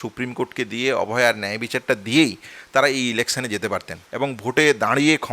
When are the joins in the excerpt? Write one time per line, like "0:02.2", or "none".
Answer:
0:04.0